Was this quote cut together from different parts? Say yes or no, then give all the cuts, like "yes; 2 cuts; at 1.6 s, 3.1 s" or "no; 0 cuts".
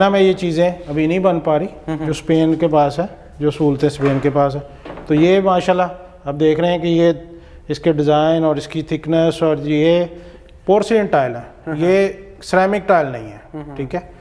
no; 0 cuts